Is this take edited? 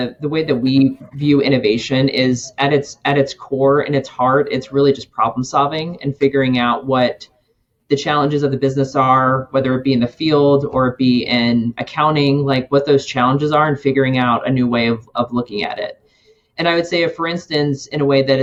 no; 0 cuts

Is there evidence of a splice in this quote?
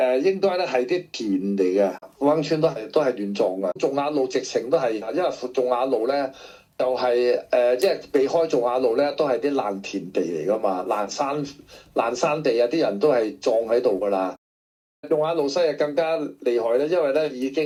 no; 0 cuts

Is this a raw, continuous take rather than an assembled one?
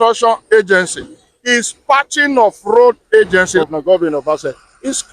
no; 1 cut; at 3.6 s

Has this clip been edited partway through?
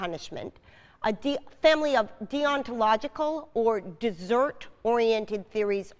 no; 0 cuts

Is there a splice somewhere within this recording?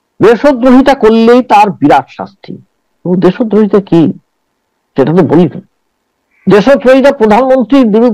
no; 0 cuts

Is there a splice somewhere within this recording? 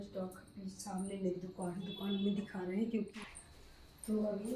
yes; 1 cut; at 3.1 s

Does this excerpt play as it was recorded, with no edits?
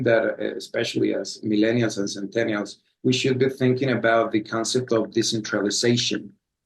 no; 1 cut; at 1.4 s

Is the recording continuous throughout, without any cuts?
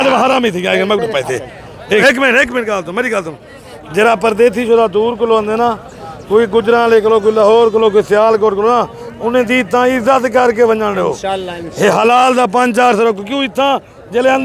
no; 1 cut; at 2.0 s

